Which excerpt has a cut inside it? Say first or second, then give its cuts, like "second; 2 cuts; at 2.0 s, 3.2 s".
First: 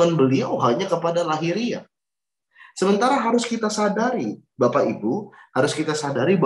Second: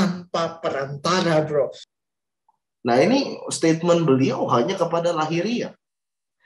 second; 1 cut; at 1.8 s